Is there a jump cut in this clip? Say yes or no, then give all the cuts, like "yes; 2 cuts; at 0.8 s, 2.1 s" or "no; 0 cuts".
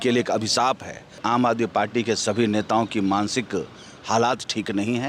yes; 1 cut; at 1.2 s